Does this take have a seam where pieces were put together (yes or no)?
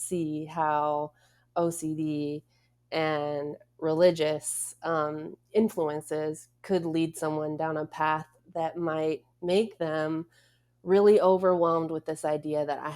no